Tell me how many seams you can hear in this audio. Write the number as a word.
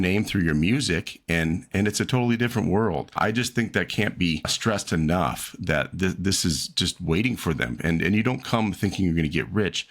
two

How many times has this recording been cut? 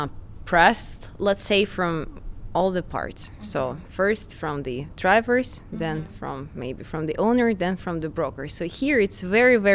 zero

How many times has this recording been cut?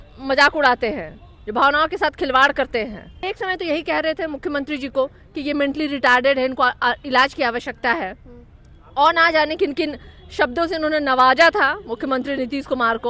one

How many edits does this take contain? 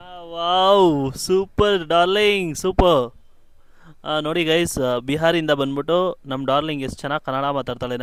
zero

